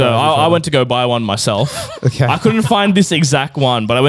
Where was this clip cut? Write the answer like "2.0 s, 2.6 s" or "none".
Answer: none